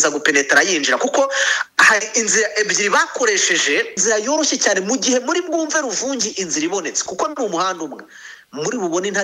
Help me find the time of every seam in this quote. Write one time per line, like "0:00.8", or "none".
0:04.0